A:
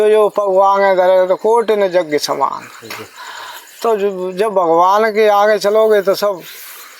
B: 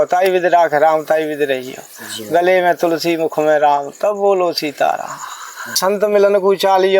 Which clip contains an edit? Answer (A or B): B